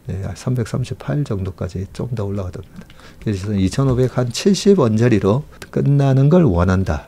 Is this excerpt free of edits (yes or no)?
no